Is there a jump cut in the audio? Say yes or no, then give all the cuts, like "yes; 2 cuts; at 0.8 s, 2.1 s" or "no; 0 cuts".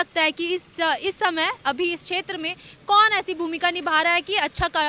no; 0 cuts